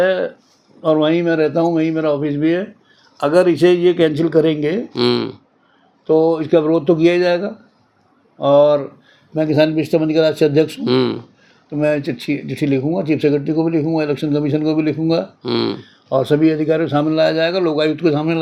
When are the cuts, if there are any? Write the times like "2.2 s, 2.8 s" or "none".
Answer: none